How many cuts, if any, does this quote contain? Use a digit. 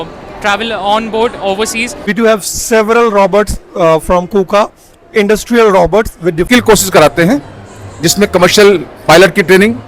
2